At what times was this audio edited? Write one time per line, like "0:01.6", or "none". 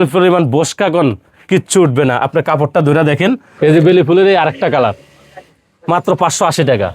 0:03.5